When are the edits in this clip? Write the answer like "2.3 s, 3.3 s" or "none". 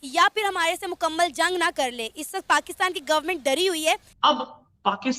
4.1 s